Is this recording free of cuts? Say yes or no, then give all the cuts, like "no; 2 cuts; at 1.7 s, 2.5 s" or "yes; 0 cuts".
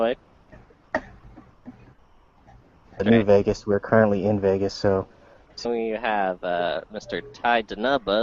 yes; 0 cuts